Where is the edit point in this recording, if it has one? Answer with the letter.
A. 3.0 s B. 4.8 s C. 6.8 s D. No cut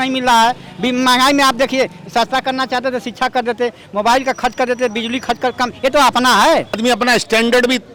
C